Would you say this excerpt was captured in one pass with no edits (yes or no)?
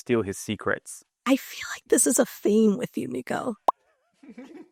yes